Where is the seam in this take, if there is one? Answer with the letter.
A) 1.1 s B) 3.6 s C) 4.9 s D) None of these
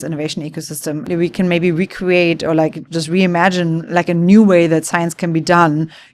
A